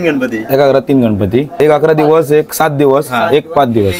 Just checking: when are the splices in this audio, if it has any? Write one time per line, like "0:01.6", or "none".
0:01.6